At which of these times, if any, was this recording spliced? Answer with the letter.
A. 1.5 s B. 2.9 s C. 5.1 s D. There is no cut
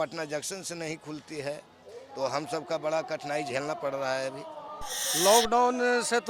C